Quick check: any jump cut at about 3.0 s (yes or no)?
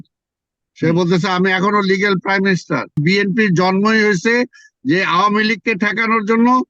yes